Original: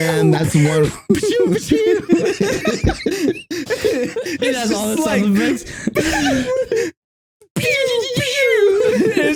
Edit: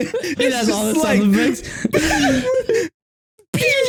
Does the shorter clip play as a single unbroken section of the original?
yes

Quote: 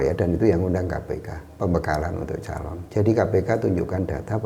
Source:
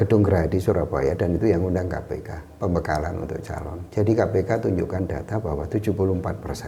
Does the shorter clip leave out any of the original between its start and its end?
no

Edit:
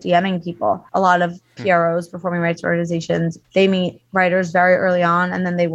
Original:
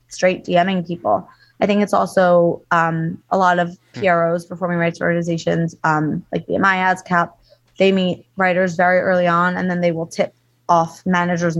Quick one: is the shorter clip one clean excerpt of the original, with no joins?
no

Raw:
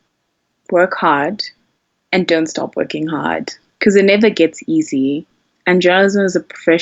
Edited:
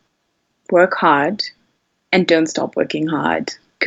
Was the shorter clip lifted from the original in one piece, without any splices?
yes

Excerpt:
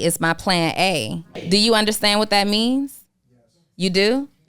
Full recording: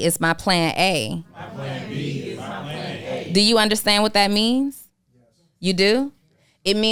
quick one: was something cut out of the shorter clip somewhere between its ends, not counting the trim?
yes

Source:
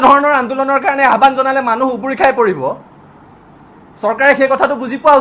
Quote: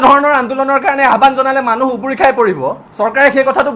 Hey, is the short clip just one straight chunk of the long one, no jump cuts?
no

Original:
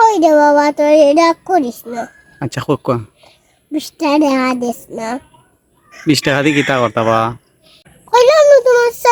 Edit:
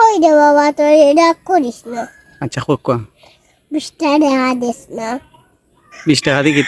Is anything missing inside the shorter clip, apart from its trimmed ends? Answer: no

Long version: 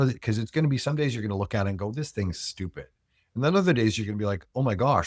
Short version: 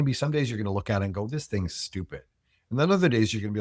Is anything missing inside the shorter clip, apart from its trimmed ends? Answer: no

